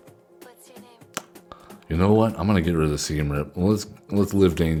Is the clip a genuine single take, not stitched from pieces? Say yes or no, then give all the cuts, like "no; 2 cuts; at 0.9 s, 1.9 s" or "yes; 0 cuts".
yes; 0 cuts